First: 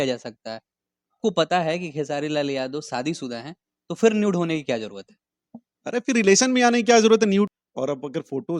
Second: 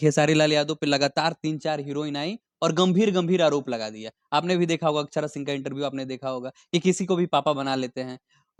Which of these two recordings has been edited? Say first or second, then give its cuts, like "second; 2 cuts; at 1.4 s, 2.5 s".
first; 2 cuts; at 1.2 s, 7.5 s